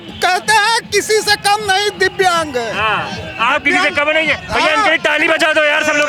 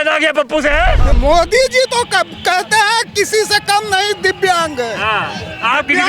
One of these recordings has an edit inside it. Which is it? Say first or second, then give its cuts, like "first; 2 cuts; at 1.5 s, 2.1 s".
second; 1 cut; at 1.1 s